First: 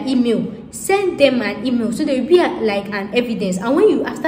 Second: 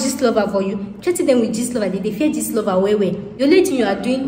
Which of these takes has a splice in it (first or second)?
second